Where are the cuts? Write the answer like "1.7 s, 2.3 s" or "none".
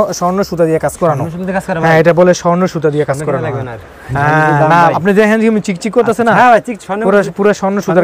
none